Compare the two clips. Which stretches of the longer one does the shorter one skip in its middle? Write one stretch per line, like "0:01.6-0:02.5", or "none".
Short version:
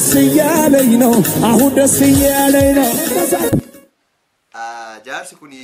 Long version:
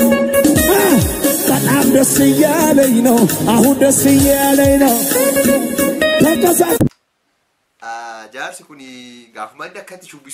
0:05.1-0:06.3